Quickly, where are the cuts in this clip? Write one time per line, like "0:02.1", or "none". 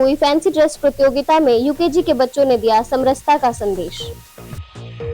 0:03.9